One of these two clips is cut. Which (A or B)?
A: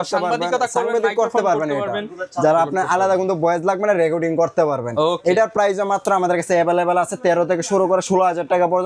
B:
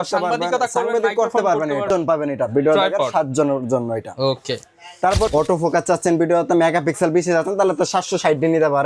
B